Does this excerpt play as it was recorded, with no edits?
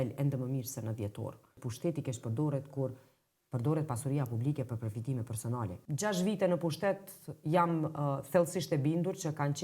no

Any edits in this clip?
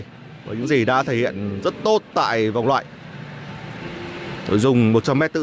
no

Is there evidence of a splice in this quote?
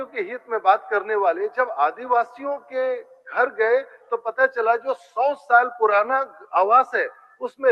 no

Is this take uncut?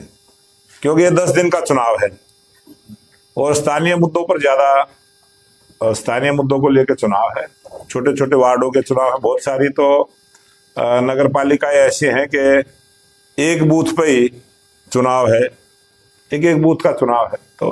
yes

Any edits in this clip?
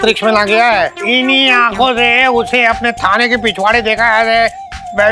yes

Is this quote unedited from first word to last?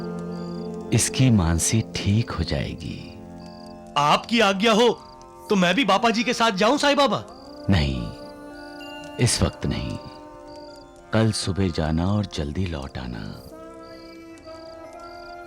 yes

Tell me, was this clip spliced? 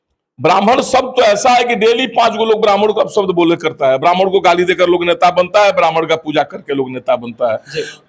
no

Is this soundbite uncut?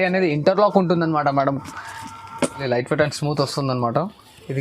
no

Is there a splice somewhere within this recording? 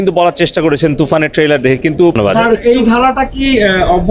yes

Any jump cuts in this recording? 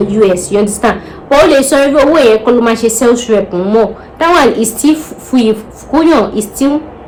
no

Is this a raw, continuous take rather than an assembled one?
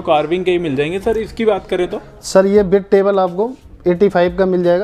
yes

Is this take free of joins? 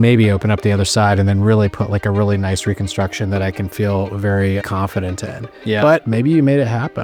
yes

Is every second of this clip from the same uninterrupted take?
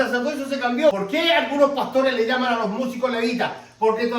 no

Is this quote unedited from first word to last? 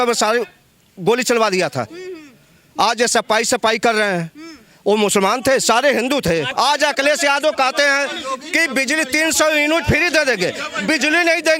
no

